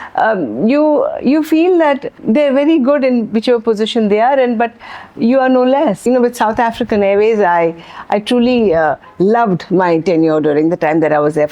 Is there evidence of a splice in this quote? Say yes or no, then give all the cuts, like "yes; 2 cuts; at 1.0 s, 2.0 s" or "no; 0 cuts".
yes; 2 cuts; at 2.2 s, 6.0 s